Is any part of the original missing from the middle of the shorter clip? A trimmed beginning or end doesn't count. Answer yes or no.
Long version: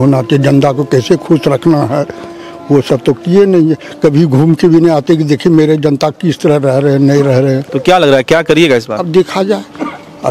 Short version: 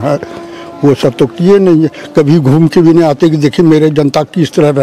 no